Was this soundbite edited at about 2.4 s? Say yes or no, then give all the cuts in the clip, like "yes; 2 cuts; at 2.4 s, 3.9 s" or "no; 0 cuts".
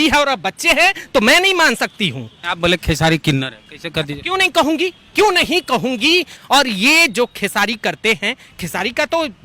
yes; 2 cuts; at 2.4 s, 6.3 s